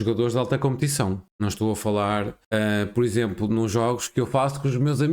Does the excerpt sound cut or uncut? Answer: cut